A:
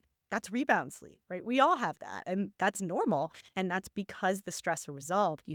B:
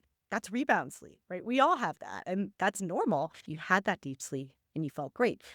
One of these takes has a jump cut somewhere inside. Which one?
B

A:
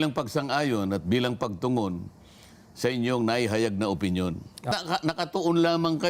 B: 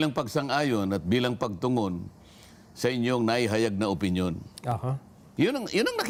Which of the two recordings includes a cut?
A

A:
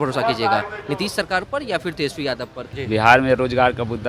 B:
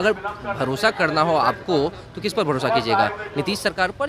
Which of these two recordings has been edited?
A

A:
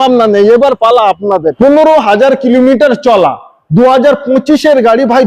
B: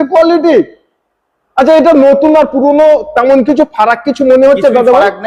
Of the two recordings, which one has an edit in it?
A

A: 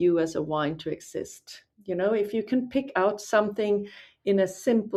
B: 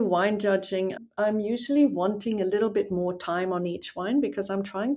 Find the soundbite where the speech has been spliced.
B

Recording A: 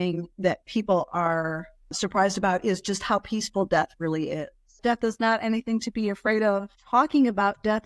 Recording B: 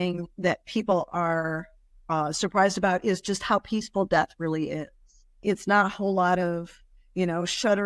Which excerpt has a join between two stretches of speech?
A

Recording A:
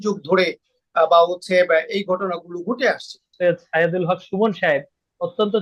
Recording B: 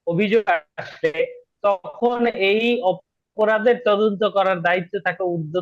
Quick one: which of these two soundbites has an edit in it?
A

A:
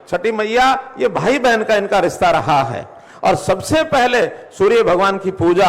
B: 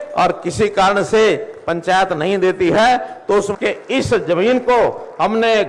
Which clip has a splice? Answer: B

